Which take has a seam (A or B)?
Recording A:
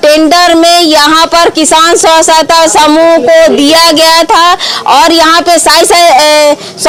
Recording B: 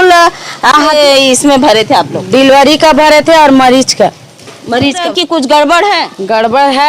B